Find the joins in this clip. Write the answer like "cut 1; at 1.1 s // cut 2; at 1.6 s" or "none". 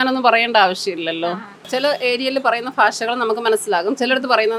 cut 1; at 1.7 s